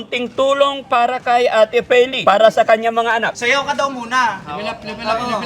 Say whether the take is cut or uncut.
cut